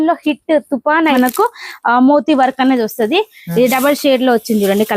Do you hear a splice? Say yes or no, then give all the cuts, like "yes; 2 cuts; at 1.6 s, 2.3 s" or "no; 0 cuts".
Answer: yes; 1 cut; at 1.1 s